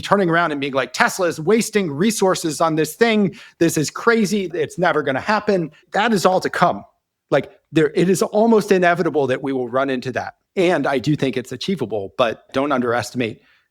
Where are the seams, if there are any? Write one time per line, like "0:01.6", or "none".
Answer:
0:04.5
0:05.8
0:10.4
0:12.5